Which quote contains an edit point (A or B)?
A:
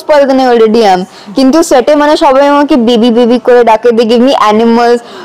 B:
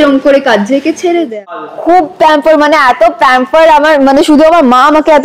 B